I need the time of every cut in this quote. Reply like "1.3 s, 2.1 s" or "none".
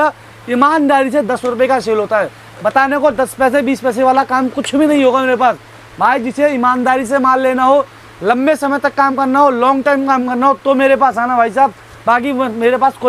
none